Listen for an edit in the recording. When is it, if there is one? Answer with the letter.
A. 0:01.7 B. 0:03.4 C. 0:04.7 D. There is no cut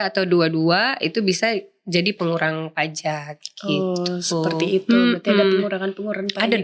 D